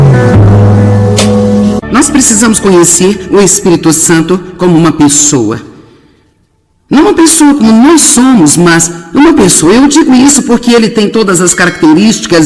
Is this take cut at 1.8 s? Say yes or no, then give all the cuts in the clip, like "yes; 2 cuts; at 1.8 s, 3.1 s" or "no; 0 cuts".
yes; 1 cut; at 1.8 s